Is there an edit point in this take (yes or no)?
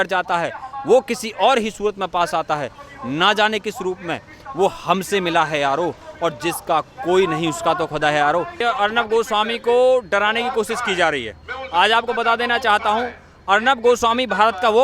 yes